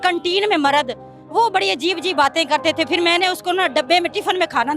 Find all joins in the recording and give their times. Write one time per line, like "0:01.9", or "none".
none

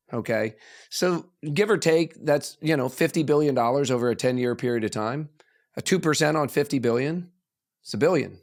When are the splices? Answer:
none

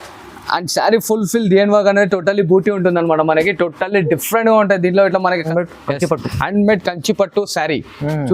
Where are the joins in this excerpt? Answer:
0:05.5

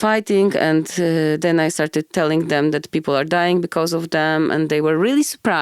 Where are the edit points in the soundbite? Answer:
0:02.1

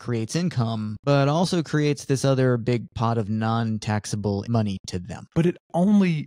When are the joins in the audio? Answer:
0:05.2

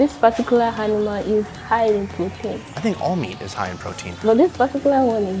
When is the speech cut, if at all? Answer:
0:02.7
0:04.1

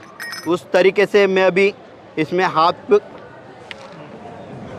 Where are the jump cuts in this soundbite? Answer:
none

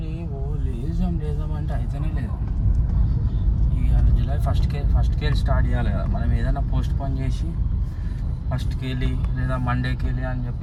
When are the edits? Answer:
none

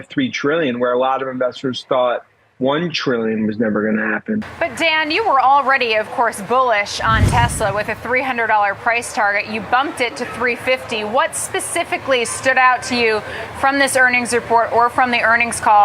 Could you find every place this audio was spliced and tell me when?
0:04.5

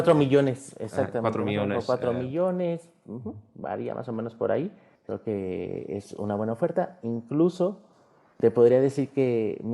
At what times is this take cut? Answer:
0:04.9

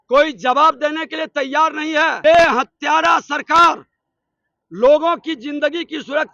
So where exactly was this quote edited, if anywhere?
0:02.2

